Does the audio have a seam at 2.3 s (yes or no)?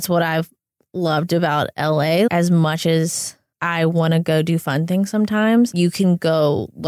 yes